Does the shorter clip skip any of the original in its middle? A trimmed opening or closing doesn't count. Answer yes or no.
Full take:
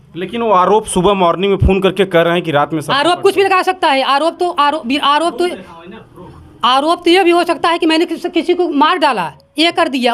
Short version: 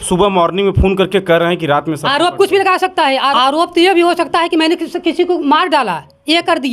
yes